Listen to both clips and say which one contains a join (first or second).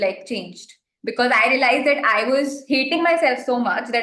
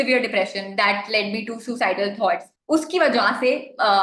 second